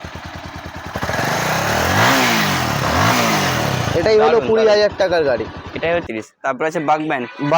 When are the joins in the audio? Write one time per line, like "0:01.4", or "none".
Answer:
0:06.1